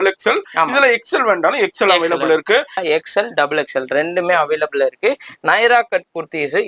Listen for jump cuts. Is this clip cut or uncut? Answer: cut